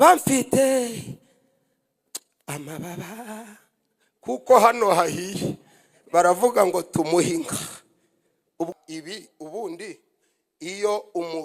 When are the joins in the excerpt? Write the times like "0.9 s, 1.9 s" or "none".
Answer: 8.7 s